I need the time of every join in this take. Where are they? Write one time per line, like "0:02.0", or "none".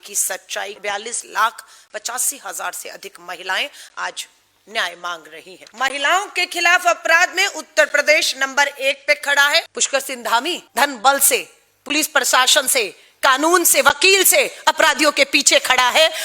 0:05.6
0:09.8
0:10.6